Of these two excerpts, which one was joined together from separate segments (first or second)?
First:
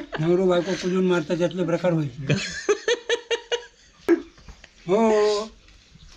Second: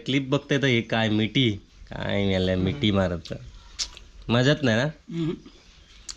first